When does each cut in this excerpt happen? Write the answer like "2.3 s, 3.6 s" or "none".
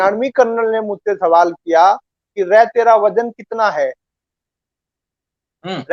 none